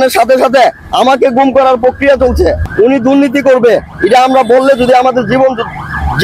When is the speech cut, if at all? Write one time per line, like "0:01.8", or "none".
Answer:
0:02.6